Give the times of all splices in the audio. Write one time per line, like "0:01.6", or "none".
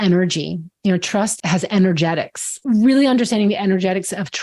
0:01.4
0:02.5